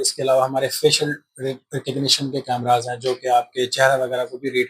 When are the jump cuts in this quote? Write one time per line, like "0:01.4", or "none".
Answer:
none